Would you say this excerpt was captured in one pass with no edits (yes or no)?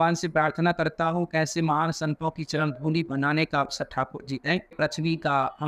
no